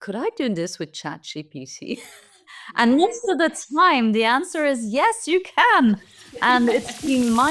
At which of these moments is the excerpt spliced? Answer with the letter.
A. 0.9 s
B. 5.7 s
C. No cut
C